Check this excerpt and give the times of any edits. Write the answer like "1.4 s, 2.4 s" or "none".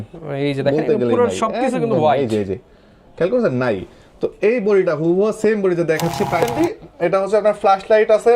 6.5 s